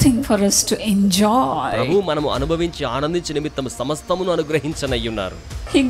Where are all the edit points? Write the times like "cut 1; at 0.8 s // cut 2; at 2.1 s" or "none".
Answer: none